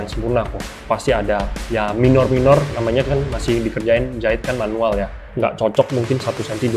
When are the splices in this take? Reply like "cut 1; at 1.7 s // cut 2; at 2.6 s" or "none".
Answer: cut 1; at 1.5 s // cut 2; at 5.2 s

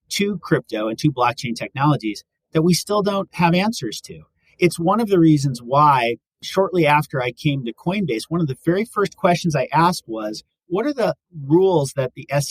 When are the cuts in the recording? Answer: cut 1; at 3.3 s

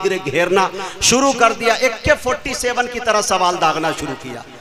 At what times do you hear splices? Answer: none

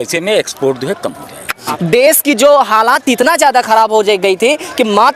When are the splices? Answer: cut 1; at 1.6 s

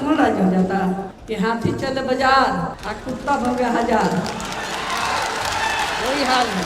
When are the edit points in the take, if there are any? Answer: cut 1; at 1.2 s // cut 2; at 2.8 s

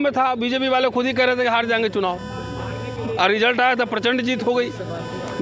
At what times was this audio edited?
none

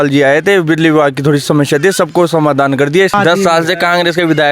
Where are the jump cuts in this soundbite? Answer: none

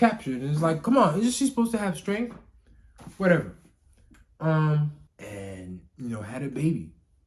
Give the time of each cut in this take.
cut 1; at 5.0 s

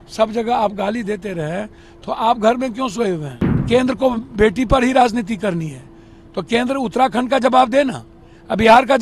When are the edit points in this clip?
cut 1; at 3.6 s

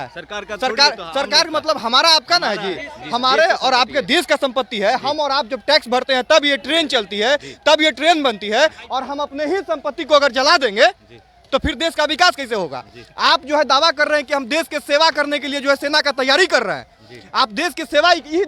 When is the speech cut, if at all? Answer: none

